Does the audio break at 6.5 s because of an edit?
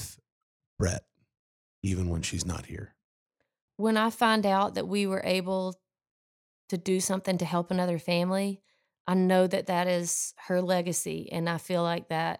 no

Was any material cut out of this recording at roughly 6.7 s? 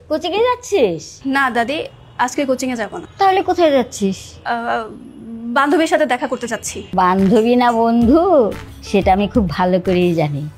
yes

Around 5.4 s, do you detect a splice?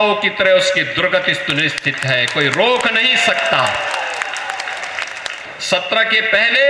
yes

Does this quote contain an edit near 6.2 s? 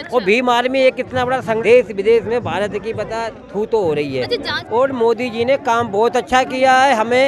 no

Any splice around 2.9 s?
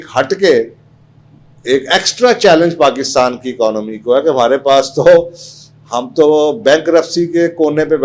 no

